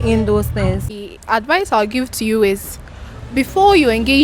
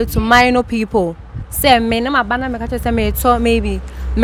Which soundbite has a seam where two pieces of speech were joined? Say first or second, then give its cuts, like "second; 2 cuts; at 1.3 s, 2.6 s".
first; 1 cut; at 0.9 s